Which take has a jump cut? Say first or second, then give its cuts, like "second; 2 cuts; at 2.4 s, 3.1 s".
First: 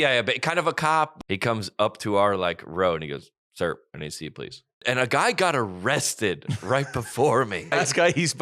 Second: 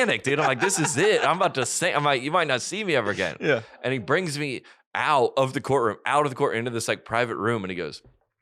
first; 3 cuts; at 1.1 s, 4.8 s, 7.7 s